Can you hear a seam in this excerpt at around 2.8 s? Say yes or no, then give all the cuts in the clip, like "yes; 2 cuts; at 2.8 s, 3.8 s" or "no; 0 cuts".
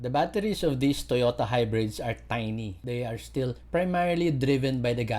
yes; 1 cut; at 2.8 s